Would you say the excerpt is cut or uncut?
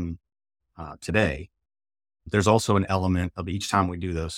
uncut